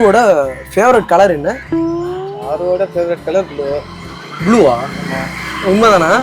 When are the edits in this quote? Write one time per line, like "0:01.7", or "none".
0:01.6